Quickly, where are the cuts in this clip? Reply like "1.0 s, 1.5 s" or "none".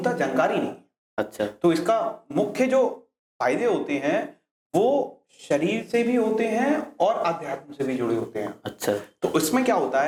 none